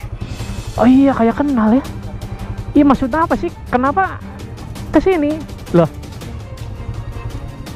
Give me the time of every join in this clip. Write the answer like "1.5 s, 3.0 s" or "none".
none